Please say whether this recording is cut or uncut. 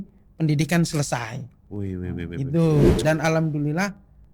cut